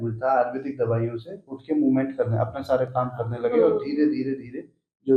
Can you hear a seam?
no; 0 cuts

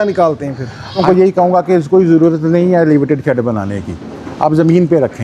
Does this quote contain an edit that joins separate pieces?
yes; 1 cut; at 1.0 s

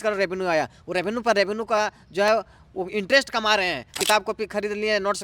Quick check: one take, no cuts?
no; 1 cut; at 3.9 s

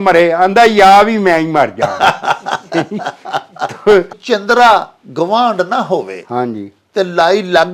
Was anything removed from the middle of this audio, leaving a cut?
yes; 1 cut; at 4.2 s

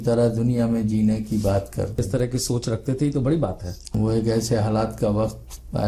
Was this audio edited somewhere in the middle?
yes; 2 cuts; at 1.9 s, 3.8 s

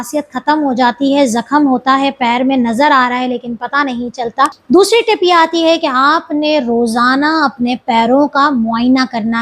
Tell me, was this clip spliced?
yes; 1 cut; at 4.6 s

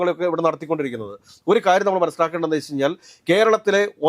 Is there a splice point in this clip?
no; 0 cuts

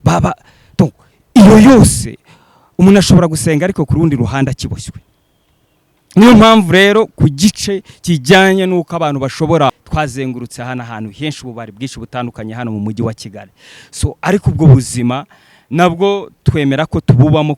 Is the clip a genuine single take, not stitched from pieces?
no; 1 cut; at 9.8 s

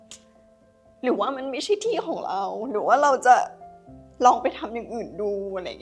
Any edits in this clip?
no; 0 cuts

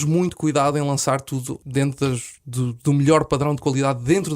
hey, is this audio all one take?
no; 1 cut; at 1.5 s

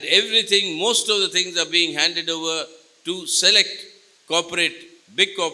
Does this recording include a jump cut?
no; 0 cuts

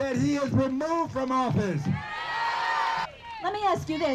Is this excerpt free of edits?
no; 1 cut; at 3.1 s

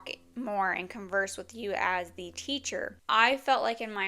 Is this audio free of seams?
no; 1 cut; at 3.0 s

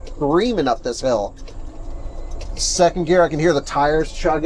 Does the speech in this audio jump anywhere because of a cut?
no; 0 cuts

